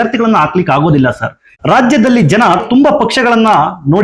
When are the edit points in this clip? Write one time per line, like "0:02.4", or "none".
0:01.5